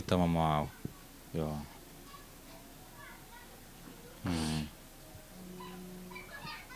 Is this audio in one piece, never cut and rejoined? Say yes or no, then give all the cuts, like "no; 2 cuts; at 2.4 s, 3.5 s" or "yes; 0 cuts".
yes; 0 cuts